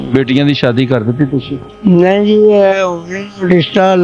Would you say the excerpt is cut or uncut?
uncut